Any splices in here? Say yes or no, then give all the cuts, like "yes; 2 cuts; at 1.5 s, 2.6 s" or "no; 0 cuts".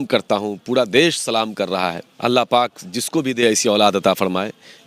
yes; 1 cut; at 2.1 s